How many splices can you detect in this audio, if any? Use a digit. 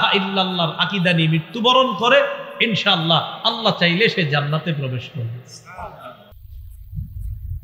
1